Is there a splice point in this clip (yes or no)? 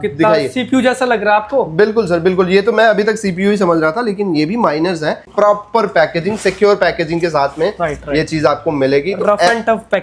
yes